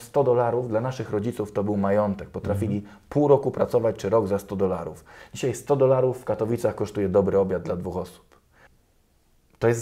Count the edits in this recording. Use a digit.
1